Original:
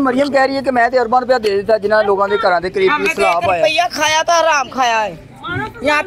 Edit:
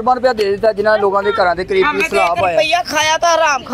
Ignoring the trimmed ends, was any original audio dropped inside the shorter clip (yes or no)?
no